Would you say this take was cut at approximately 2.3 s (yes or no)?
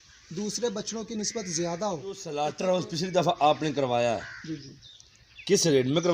yes